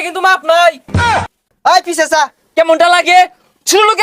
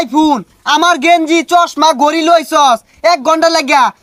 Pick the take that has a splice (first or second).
first